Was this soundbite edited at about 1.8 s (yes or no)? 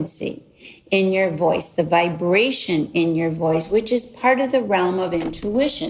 no